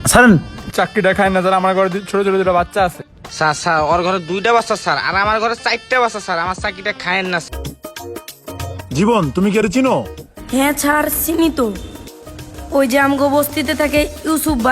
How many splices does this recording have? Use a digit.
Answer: 1